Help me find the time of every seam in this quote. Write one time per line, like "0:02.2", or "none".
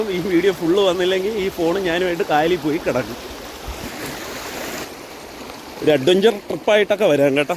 none